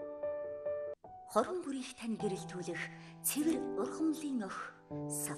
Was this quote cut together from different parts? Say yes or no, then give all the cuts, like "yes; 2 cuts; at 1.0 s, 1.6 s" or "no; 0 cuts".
yes; 1 cut; at 1.0 s